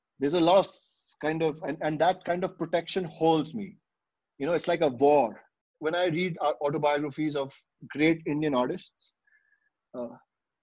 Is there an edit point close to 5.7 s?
yes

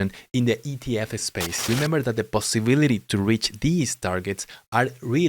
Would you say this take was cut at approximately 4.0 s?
no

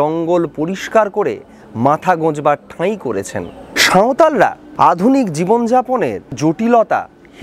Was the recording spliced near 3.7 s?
yes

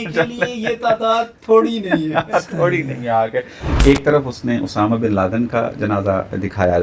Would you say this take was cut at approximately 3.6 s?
yes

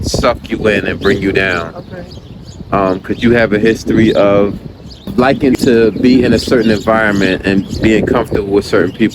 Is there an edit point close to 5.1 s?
yes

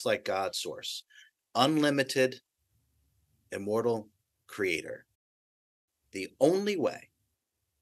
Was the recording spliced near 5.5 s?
yes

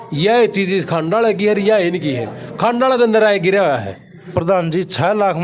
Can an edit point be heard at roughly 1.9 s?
no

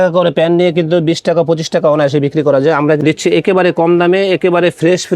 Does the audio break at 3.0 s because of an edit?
yes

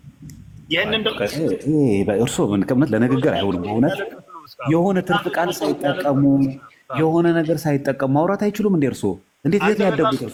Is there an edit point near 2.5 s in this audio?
no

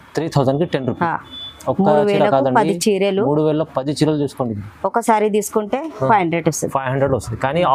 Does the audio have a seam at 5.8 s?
no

